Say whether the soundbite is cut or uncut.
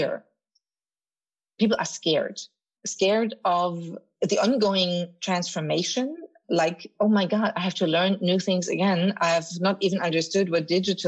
cut